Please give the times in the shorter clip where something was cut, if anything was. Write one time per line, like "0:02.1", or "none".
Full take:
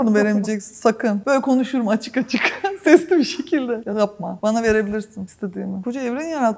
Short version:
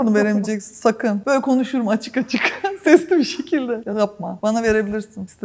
none